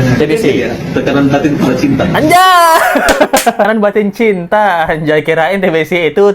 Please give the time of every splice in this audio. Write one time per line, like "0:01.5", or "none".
0:03.7